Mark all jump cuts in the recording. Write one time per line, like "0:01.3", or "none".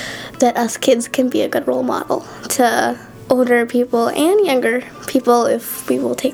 0:03.1